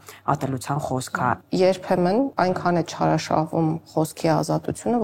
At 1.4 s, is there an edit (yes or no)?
yes